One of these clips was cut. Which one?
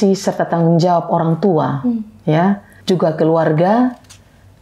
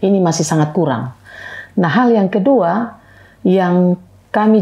first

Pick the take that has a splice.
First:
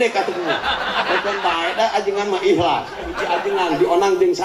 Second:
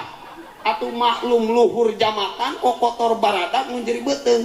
first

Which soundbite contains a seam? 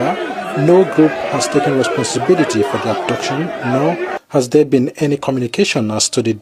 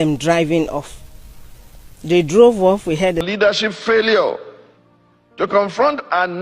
second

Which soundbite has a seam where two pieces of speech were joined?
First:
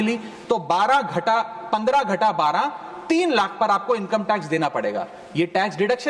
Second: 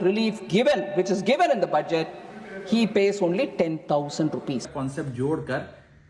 second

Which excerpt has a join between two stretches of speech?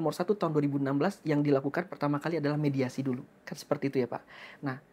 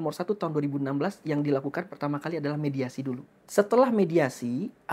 second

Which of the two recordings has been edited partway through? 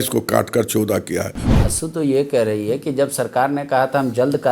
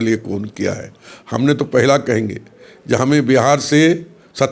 first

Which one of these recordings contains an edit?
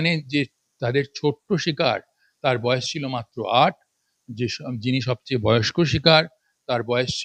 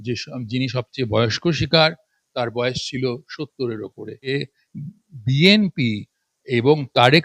second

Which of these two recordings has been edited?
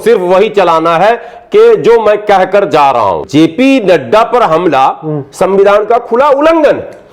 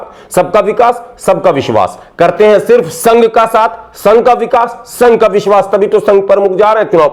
first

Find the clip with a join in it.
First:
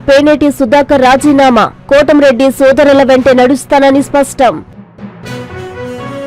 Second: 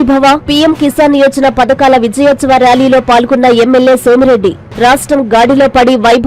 first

